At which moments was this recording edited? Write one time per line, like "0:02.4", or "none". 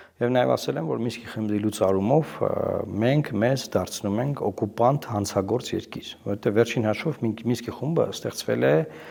none